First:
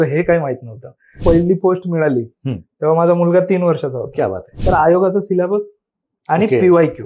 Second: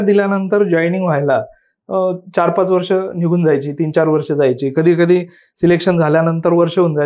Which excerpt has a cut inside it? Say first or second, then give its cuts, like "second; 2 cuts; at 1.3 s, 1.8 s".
first; 2 cuts; at 1.2 s, 4.5 s